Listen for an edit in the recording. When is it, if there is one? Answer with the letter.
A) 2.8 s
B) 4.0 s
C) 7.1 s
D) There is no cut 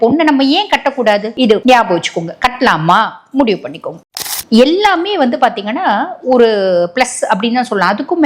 B